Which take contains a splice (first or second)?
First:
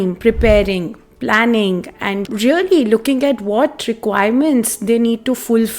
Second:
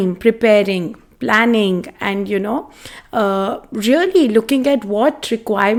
first